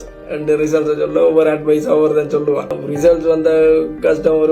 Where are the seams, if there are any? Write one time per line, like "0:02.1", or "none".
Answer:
0:02.8